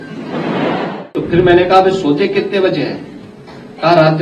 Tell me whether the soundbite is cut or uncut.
cut